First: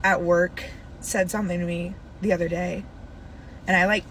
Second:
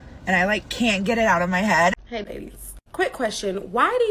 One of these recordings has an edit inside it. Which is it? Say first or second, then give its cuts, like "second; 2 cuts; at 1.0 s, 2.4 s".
second; 1 cut; at 1.9 s